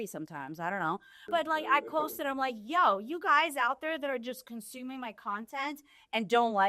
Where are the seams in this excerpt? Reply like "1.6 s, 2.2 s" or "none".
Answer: 1.1 s